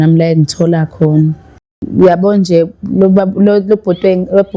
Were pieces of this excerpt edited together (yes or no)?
yes